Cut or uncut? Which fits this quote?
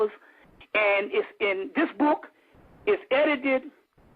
cut